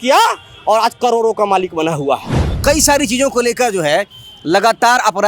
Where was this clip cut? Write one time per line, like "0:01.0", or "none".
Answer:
0:02.5